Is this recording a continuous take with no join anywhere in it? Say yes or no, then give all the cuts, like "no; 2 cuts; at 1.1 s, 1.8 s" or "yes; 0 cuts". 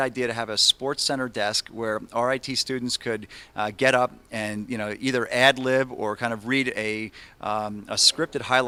yes; 0 cuts